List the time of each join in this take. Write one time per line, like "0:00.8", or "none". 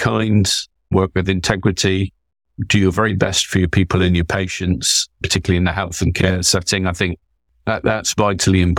none